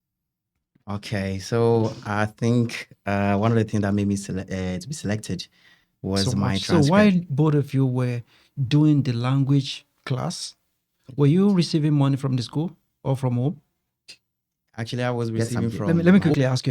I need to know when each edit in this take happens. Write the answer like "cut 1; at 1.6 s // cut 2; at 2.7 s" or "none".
cut 1; at 6.6 s // cut 2; at 15.8 s